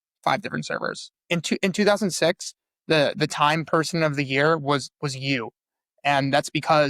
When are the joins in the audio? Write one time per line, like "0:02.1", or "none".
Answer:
0:01.2

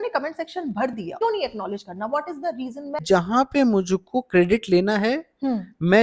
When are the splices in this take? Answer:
0:01.2
0:03.0

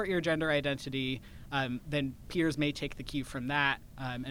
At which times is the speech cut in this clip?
none

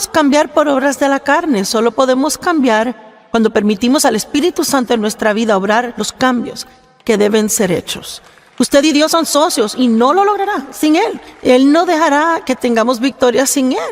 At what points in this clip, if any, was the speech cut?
none

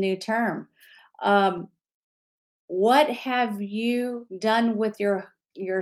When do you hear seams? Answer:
0:04.3

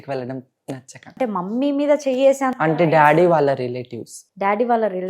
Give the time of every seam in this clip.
0:01.1

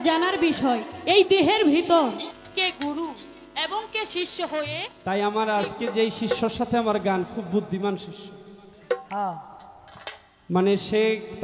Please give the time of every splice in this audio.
0:04.9

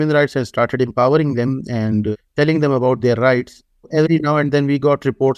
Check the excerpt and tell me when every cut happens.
0:02.1
0:03.9

